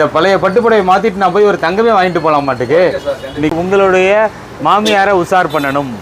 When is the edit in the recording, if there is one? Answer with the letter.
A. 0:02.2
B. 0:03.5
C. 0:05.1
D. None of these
B